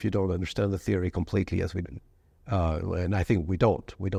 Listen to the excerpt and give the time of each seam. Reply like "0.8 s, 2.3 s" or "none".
none

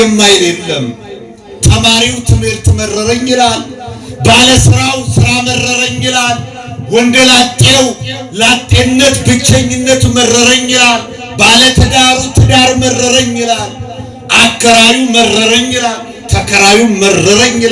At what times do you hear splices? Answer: none

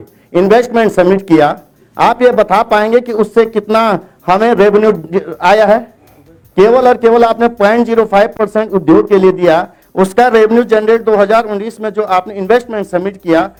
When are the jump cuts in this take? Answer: none

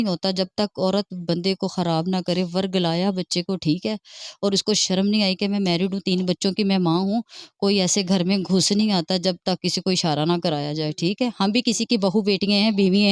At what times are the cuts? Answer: none

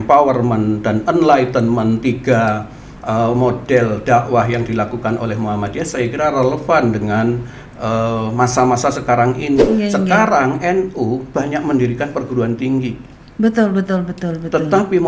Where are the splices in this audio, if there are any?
9.7 s

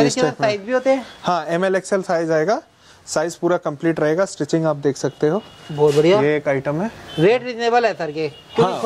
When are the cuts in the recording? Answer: none

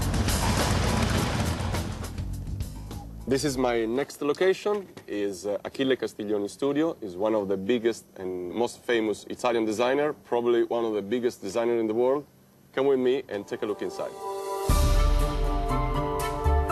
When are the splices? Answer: 0.9 s

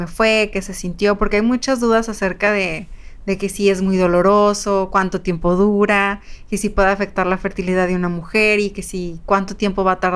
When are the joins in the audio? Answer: none

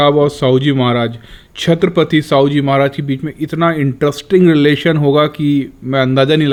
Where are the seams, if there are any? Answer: none

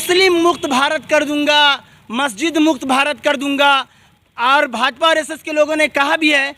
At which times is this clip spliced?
none

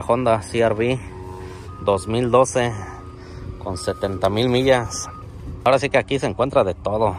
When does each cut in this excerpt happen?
5.7 s

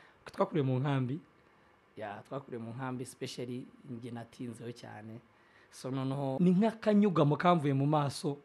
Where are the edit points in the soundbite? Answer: 6.4 s

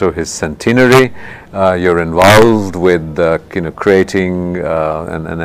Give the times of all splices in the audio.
4.2 s

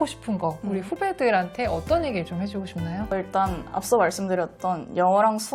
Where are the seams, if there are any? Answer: none

